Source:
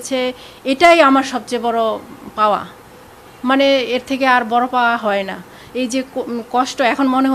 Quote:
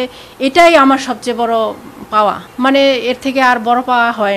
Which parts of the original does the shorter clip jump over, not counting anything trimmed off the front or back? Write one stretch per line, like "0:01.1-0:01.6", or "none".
0:02.7-0:03.3